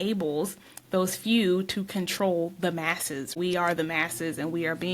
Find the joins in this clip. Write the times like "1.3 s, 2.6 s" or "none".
3.3 s